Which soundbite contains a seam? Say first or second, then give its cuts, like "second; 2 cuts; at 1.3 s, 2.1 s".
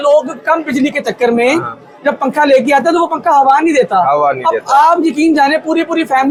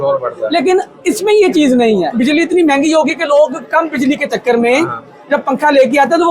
second; 1 cut; at 2.1 s